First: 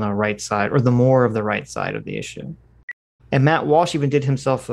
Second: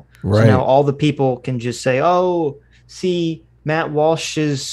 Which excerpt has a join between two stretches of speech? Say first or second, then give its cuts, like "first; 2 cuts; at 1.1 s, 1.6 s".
first; 1 cut; at 3.0 s